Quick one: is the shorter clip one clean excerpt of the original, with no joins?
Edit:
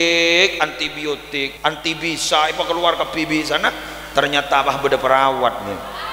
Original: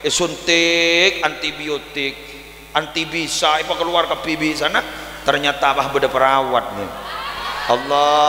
no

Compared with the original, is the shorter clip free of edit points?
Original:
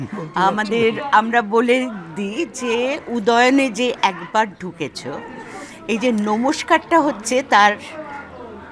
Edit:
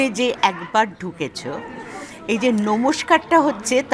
yes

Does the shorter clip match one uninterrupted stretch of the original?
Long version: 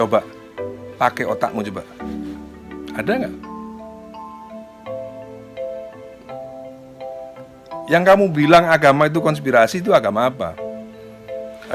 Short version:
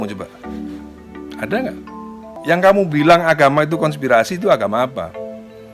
no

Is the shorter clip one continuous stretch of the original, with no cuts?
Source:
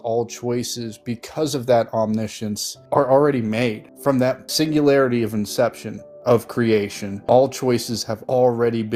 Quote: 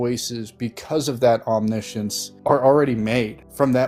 yes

